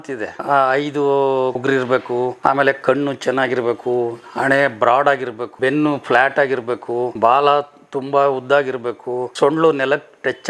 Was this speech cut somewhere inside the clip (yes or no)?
no